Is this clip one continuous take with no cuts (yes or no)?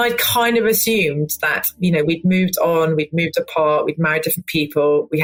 yes